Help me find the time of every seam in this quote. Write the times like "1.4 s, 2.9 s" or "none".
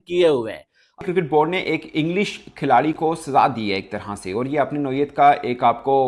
1.0 s